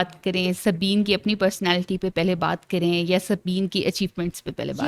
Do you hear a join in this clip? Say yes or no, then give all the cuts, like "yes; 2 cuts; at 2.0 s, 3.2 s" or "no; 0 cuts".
no; 0 cuts